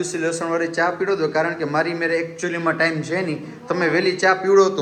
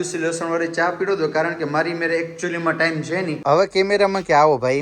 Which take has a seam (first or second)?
second